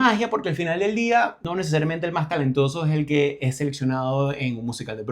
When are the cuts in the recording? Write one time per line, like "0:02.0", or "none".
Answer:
0:01.4